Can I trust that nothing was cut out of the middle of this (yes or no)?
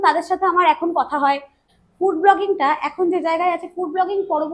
no